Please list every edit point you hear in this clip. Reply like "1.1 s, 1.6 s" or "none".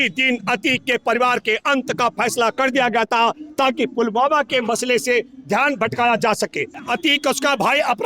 6.9 s